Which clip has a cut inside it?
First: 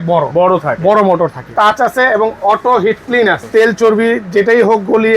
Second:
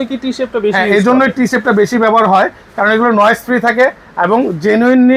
first; 2 cuts; at 1.5 s, 3.4 s

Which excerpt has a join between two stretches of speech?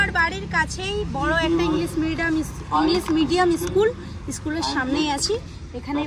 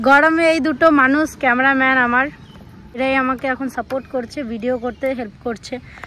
second; 1 cut; at 3.0 s

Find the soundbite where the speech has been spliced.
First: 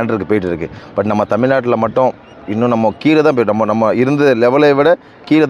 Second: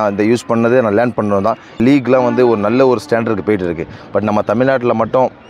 second; 1 cut; at 1.7 s

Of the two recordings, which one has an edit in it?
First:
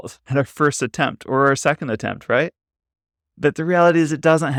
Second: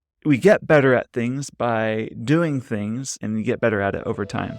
second; 1 cut; at 3.1 s

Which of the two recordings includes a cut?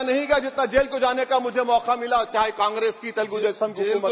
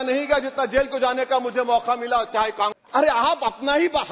second; 1 cut; at 2.7 s

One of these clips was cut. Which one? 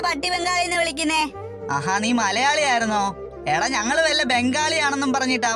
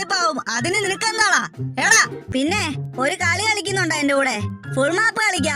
second; 1 cut; at 2.2 s

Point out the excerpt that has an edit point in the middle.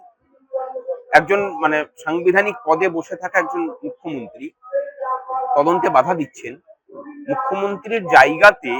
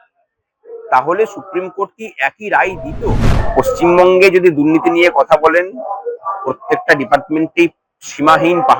second; 1 cut; at 3.4 s

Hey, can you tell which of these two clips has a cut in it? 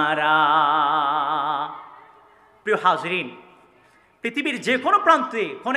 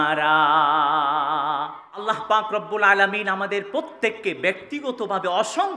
second; 1 cut; at 2.0 s

